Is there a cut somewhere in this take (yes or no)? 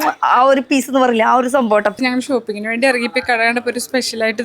yes